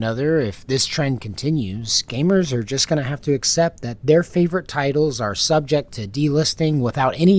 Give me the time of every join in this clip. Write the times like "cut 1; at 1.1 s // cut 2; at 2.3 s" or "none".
none

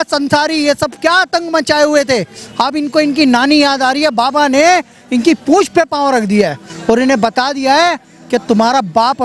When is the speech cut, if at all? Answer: none

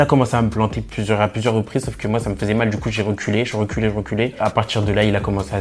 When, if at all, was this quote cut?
none

